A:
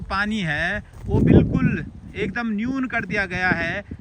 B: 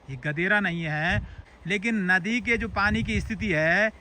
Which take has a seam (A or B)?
B